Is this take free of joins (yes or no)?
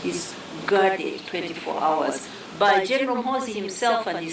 yes